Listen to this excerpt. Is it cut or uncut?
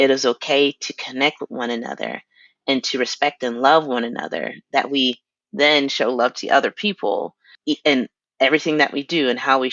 cut